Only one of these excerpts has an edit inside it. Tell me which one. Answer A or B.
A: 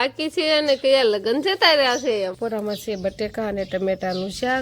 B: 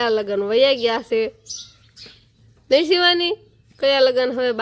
A